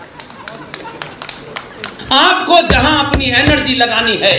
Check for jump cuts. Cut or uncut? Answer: cut